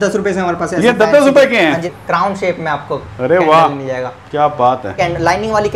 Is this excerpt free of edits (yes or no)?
no